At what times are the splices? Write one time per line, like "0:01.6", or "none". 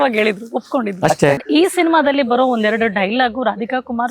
0:01.1